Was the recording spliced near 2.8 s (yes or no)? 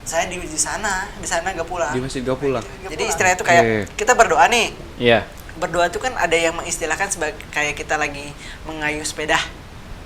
yes